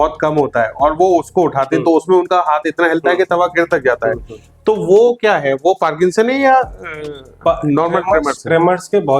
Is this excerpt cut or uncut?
uncut